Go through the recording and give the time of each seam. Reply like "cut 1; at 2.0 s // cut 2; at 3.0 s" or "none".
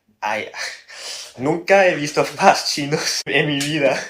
cut 1; at 3.2 s